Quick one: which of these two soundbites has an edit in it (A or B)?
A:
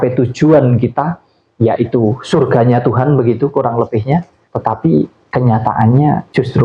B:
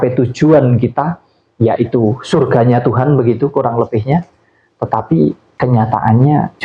A